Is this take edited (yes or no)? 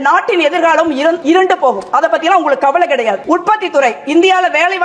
yes